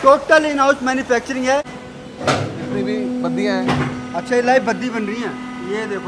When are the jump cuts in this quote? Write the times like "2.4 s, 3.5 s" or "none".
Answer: 1.8 s